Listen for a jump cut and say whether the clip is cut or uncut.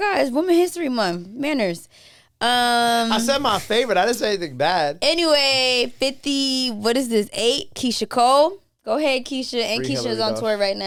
uncut